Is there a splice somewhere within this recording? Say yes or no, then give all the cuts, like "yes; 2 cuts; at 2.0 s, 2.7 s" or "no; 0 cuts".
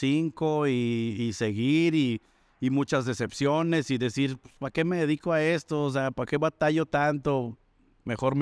no; 0 cuts